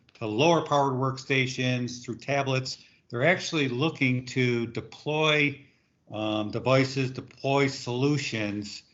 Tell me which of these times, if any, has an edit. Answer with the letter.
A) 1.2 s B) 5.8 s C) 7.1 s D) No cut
D